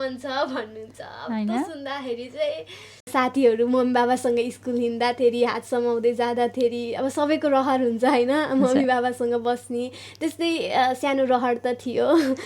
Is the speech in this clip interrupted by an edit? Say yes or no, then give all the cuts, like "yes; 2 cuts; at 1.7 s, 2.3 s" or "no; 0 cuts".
yes; 1 cut; at 3.1 s